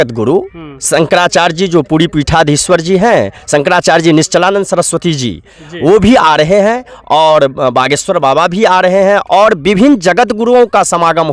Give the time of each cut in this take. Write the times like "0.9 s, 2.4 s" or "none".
none